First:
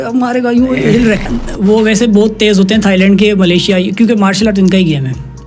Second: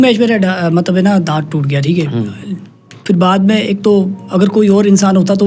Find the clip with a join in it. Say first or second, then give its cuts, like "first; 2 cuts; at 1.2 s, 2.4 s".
first; 1 cut; at 1.3 s